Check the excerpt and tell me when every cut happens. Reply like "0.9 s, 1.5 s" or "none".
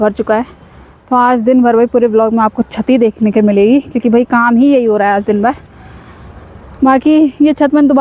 none